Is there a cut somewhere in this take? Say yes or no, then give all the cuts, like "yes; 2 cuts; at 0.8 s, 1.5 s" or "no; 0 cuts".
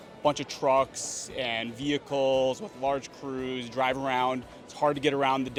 no; 0 cuts